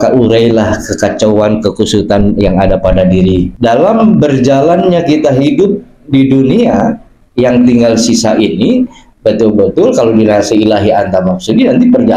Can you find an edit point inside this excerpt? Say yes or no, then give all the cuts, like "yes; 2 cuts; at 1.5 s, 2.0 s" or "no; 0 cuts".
yes; 1 cut; at 3.5 s